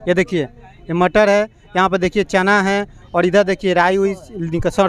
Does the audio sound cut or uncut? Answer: uncut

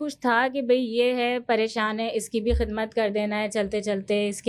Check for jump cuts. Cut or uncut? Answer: uncut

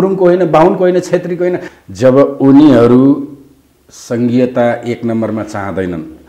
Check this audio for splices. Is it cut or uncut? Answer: cut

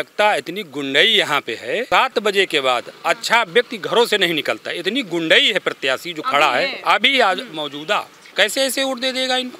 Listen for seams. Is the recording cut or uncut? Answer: cut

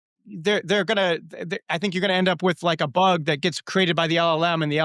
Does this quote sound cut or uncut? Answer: uncut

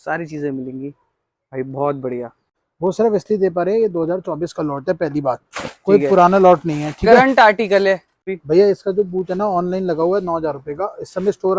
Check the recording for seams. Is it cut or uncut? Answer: cut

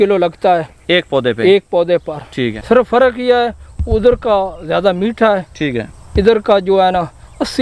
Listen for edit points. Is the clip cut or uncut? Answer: cut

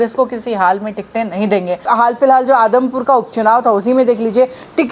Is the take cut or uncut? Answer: cut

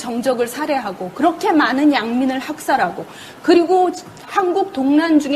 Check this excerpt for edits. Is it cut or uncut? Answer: cut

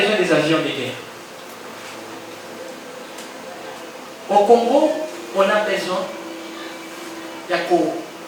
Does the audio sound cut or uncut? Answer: uncut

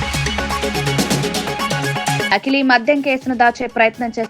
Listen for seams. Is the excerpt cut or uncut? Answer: cut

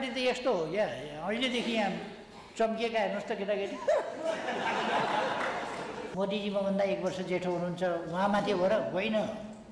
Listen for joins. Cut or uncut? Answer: cut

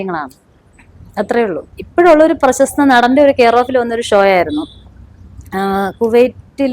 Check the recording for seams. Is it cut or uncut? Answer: cut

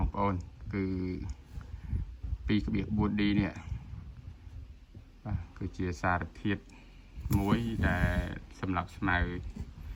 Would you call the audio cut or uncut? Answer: uncut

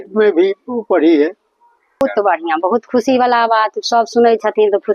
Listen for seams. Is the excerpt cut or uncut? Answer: cut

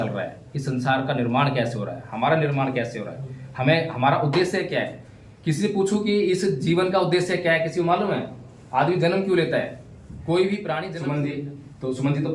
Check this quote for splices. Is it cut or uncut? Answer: cut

